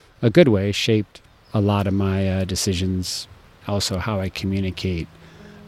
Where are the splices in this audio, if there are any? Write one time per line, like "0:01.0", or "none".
none